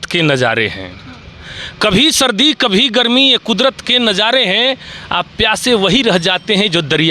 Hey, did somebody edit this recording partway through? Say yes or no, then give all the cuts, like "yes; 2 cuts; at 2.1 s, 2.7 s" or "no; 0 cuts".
no; 0 cuts